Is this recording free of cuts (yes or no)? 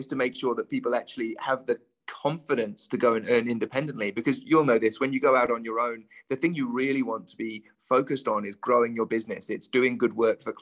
yes